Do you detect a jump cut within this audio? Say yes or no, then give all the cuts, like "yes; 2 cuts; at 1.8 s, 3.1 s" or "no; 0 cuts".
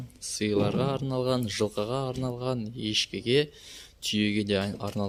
no; 0 cuts